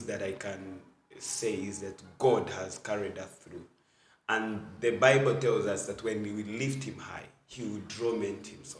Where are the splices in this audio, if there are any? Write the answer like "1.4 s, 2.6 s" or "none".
none